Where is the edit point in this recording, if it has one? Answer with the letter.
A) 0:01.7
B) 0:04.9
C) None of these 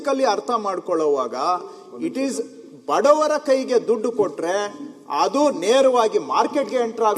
C